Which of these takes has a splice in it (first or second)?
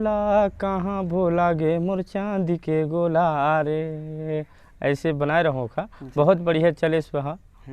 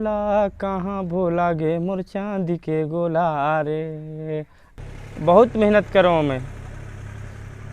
second